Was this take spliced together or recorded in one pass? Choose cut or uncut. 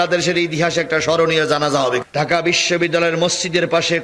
cut